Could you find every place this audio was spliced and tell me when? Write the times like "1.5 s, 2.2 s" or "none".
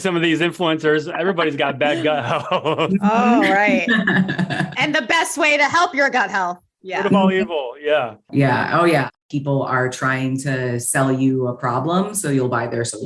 8.2 s, 9.1 s